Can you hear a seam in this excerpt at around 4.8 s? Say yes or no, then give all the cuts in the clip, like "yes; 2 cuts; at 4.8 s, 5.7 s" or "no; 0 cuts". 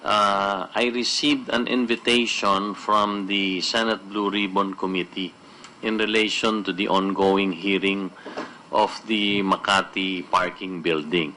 yes; 1 cut; at 4.8 s